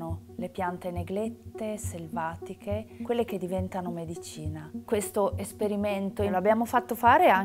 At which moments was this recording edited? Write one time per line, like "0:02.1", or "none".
0:04.7
0:06.3